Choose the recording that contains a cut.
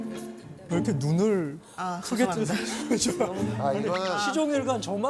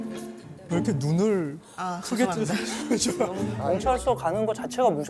second; 1 cut; at 3.6 s

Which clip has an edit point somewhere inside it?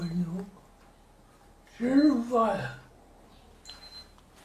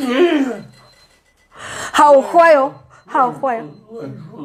first; 1 cut; at 3.2 s

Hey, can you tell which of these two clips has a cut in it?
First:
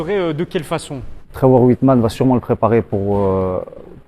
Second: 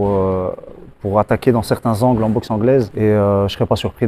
first; 1 cut; at 1.3 s

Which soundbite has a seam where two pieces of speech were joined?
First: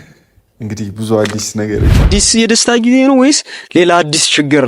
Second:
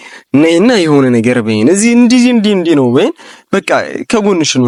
first; 1 cut; at 2.1 s

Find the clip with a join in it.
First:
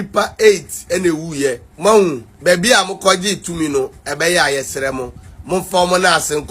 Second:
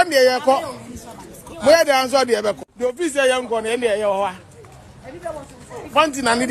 first; 2 cuts; at 1.7 s, 2.3 s

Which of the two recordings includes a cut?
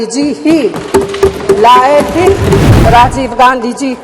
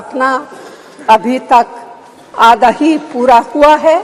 first; 1 cut; at 2.7 s

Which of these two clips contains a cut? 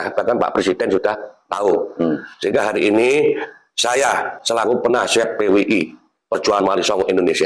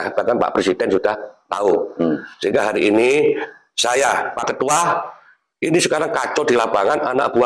second; 1 cut; at 4.4 s

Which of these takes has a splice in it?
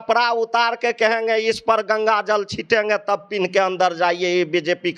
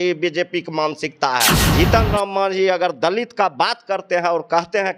second; 1 cut; at 1.6 s

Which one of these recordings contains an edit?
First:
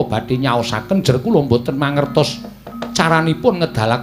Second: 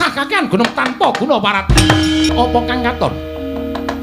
second; 1 cut; at 2.3 s

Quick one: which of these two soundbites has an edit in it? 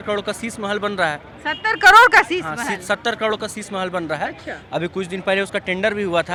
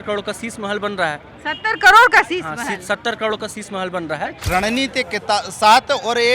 second; 1 cut; at 4.4 s

